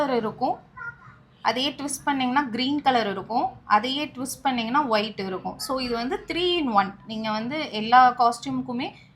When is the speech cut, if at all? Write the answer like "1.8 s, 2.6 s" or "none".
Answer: none

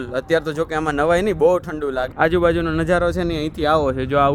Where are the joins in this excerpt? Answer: 2.1 s

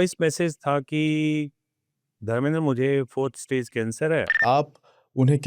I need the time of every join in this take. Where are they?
4.4 s

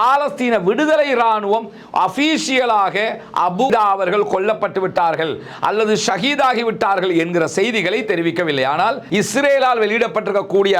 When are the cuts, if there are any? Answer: 3.7 s, 8.6 s

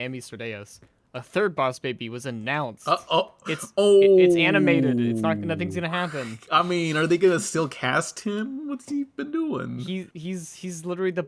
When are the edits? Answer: 9.8 s

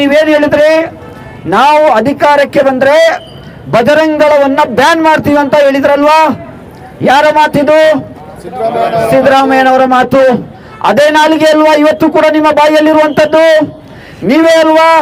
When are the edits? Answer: none

